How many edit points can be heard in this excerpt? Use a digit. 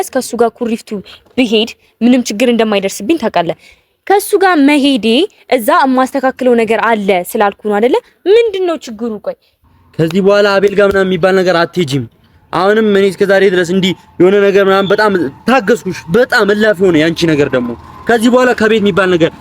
1